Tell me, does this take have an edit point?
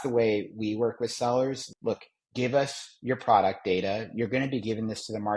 yes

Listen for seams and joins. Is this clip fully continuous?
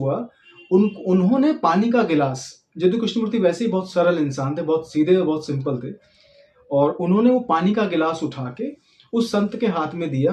yes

